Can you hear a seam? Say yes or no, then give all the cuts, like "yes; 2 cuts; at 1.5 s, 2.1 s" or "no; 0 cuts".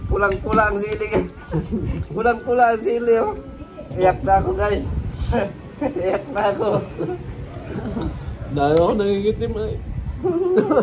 yes; 1 cut; at 3.9 s